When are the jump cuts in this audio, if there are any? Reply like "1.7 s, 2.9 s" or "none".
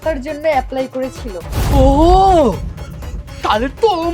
1.7 s